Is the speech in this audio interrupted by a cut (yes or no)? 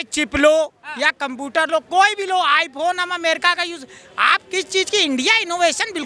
no